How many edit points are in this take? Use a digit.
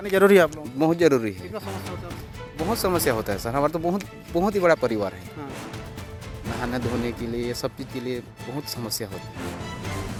0